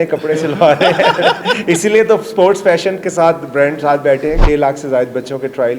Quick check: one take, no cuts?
no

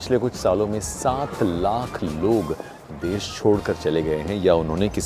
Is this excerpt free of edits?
yes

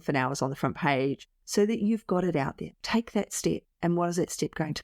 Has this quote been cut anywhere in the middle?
yes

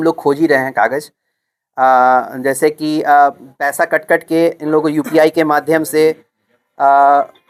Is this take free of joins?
yes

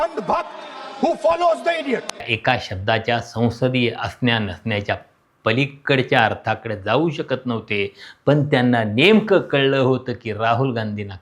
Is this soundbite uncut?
no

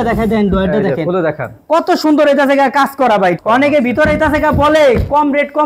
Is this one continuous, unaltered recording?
yes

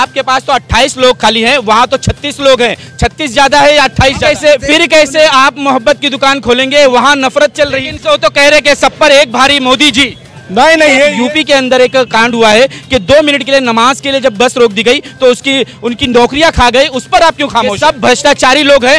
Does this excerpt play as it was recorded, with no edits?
no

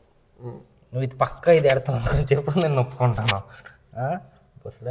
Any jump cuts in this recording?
no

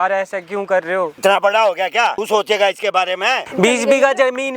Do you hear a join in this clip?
yes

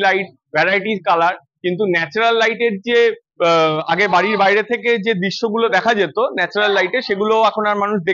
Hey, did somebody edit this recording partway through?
no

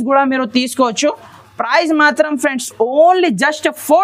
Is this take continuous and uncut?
yes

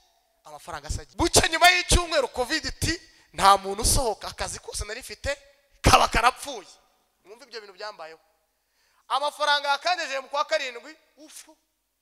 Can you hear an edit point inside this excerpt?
yes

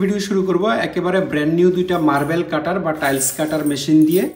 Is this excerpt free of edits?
yes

